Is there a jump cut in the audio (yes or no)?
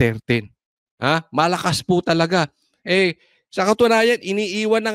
no